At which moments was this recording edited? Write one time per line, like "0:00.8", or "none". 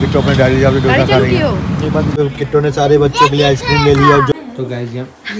0:02.1
0:04.3